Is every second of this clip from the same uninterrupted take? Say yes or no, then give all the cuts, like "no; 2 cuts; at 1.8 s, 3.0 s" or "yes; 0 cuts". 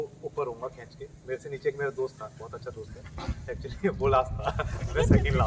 yes; 0 cuts